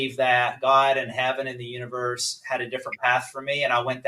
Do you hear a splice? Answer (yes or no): no